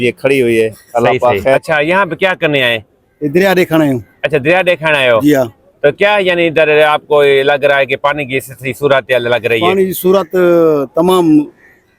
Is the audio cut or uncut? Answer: cut